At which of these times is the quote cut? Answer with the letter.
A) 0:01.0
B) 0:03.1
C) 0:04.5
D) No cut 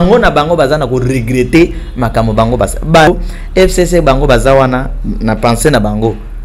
B